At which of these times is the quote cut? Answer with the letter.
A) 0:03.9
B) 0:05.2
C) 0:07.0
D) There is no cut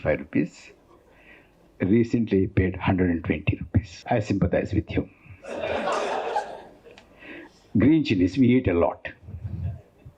A